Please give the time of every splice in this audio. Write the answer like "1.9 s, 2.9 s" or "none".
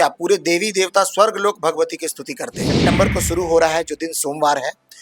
2.7 s